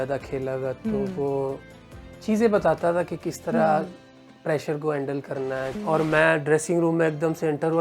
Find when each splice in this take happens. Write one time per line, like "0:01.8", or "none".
0:05.8